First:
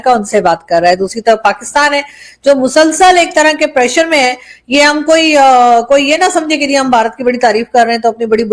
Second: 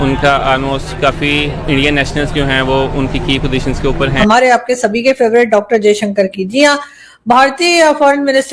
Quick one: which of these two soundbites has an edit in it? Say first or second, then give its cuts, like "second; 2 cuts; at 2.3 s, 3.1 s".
second; 1 cut; at 4.1 s